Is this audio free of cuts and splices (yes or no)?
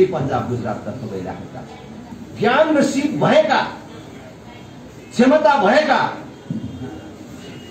no